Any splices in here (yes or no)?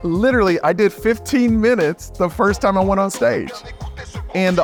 no